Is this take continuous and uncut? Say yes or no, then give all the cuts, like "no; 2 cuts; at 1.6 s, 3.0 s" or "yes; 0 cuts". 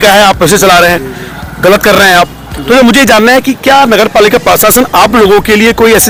yes; 0 cuts